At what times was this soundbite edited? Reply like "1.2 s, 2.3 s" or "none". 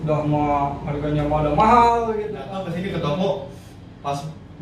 2.3 s